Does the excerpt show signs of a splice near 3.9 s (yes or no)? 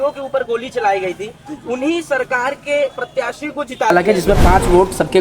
yes